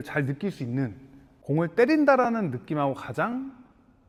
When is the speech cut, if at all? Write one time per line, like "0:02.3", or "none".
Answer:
none